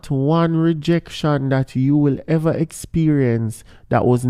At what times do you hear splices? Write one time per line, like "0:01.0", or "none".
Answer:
none